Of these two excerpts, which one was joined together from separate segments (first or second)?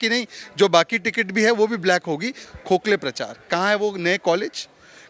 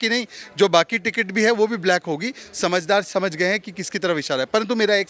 first